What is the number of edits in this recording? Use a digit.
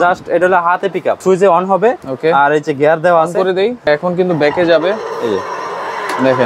2